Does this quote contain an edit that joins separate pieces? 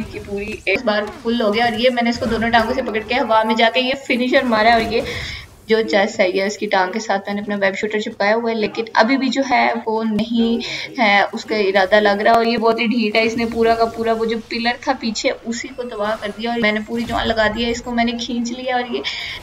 yes; 2 cuts; at 0.8 s, 16.6 s

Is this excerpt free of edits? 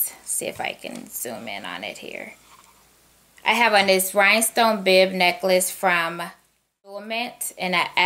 no; 1 cut; at 7.0 s

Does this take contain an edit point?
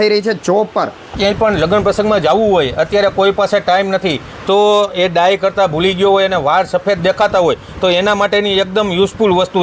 yes; 1 cut; at 1.1 s

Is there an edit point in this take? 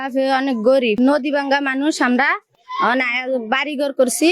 yes; 1 cut; at 1.0 s

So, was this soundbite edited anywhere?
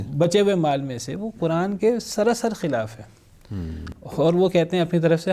no; 0 cuts

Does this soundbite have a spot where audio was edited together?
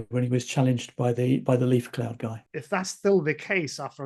yes; 1 cut; at 2.3 s

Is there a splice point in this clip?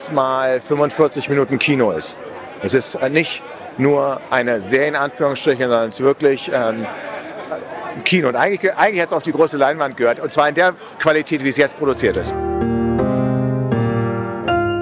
no; 0 cuts

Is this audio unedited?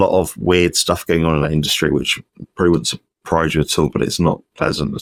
yes; 0 cuts

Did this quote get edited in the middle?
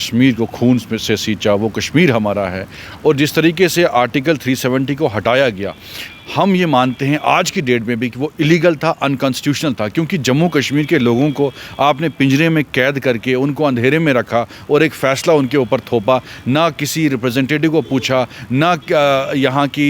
no; 0 cuts

